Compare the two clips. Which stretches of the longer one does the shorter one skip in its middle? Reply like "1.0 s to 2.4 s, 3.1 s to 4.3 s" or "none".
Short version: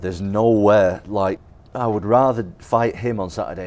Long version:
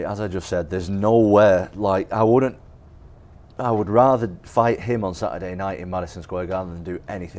2.1 s to 3.2 s